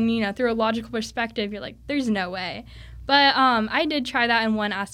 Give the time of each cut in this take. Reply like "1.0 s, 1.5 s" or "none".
none